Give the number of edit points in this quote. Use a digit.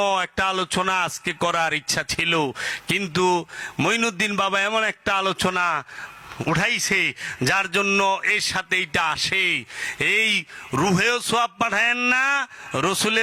0